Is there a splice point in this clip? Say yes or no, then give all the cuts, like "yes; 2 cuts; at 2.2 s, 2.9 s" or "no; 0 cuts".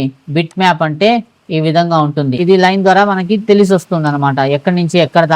yes; 1 cut; at 2.3 s